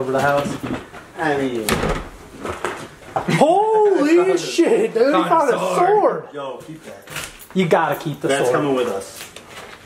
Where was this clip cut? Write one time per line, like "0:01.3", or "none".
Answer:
none